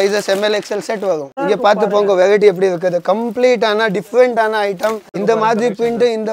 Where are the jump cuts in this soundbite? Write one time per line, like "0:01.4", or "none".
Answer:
0:01.3
0:05.2